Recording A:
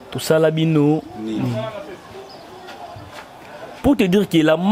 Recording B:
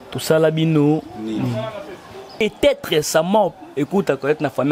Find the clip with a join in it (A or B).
B